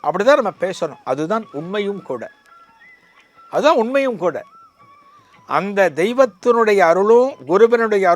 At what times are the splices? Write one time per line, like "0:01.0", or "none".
none